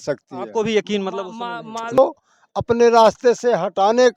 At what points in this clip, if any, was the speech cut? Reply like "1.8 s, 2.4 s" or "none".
2.0 s